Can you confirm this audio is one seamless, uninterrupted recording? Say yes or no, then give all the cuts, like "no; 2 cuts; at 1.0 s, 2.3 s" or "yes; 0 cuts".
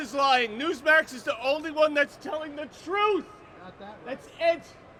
yes; 0 cuts